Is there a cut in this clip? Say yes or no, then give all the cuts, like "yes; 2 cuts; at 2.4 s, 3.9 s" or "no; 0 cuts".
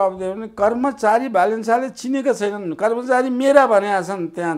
no; 0 cuts